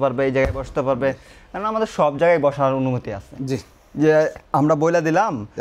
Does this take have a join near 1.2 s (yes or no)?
no